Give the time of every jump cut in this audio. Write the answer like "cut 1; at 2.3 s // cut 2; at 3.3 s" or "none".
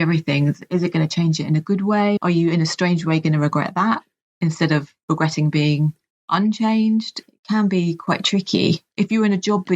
cut 1; at 2.2 s // cut 2; at 7.2 s // cut 3; at 8.9 s